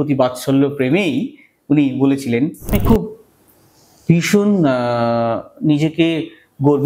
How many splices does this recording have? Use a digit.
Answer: 1